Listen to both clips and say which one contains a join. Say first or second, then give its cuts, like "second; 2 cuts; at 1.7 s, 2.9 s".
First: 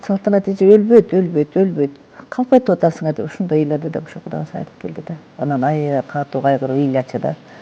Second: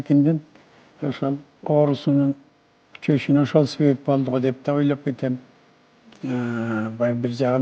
first; 1 cut; at 5.3 s